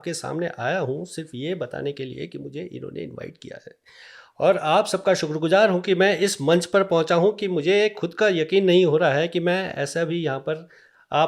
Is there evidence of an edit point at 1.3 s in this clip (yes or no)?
no